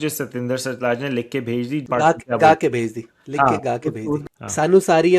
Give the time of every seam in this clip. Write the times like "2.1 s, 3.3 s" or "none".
1.8 s, 4.2 s